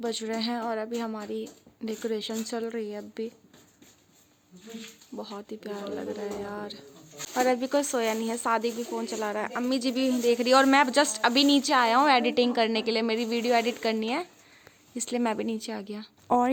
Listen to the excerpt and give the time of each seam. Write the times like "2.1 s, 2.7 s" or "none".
none